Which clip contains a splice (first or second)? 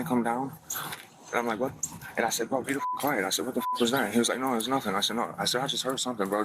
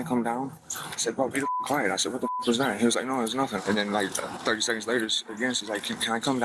second